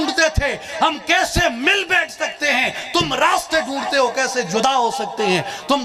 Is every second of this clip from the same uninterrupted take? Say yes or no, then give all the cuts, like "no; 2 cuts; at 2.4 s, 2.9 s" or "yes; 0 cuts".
yes; 0 cuts